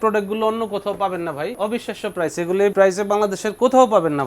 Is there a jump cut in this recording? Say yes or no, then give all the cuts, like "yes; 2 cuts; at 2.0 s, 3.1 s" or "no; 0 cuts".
yes; 2 cuts; at 1.5 s, 2.7 s